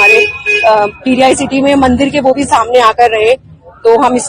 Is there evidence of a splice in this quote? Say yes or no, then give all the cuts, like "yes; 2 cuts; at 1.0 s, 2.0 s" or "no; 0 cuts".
no; 0 cuts